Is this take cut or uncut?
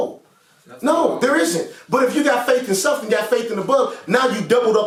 uncut